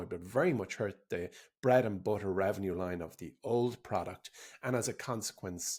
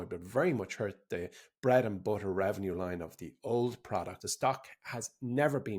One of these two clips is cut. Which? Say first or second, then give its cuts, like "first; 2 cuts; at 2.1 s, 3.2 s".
second; 1 cut; at 4.3 s